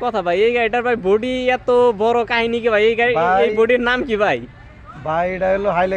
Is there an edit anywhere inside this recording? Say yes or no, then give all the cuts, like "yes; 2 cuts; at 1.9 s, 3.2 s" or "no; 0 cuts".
no; 0 cuts